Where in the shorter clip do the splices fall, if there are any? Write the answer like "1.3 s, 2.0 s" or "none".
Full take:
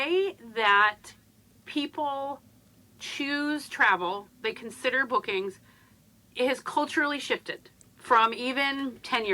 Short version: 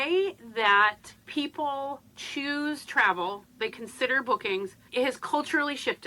1.1 s, 2.1 s, 4.8 s